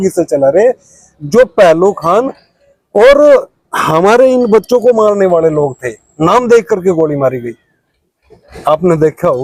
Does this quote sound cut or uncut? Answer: uncut